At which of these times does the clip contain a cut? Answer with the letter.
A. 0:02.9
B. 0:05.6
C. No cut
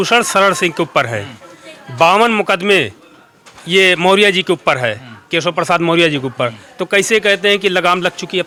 C